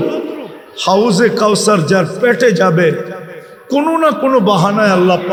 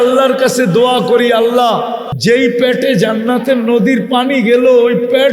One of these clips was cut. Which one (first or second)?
second